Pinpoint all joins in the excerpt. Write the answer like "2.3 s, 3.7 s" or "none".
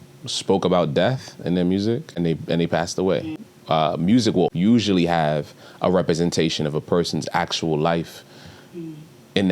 2.1 s, 3.5 s, 4.5 s

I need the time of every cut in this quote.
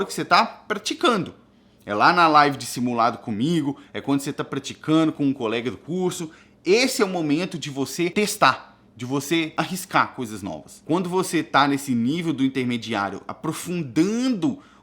8.1 s, 9.5 s, 10.7 s

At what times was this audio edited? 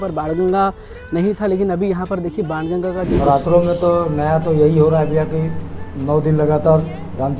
3.1 s

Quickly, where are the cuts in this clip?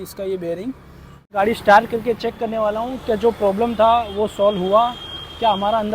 1.4 s

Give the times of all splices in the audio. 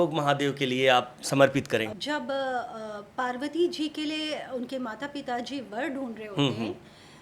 2.0 s

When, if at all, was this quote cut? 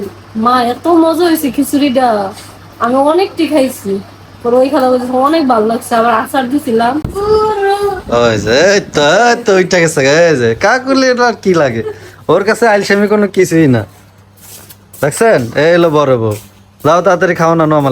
7.1 s

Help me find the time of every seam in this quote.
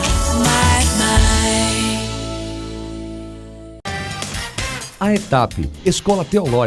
3.7 s

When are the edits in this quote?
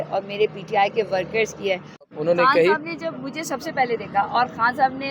2.0 s

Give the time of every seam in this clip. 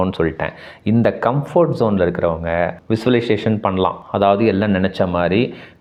none

